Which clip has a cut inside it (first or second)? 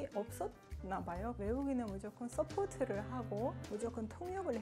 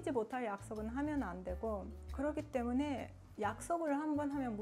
second